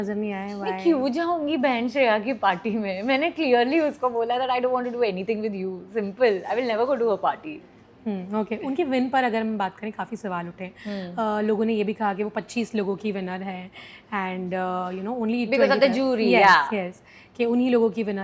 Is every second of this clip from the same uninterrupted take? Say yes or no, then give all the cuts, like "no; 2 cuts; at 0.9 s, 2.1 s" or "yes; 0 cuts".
yes; 0 cuts